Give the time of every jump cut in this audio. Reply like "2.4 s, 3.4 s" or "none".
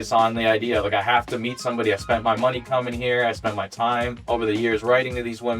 4.2 s

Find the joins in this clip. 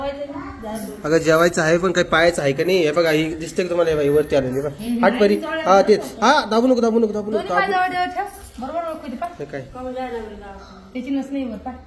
none

